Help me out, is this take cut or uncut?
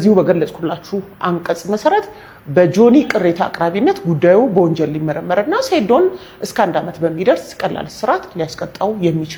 uncut